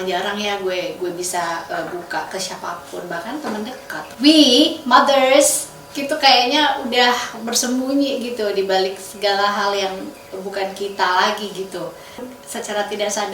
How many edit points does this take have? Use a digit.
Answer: 2